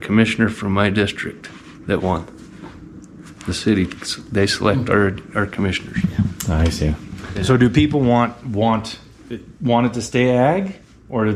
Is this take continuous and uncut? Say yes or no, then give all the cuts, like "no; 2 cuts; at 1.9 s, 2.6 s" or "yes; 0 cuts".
yes; 0 cuts